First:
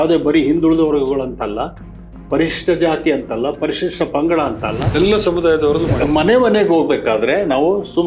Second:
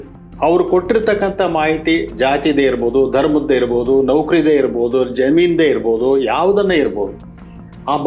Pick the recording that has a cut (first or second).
first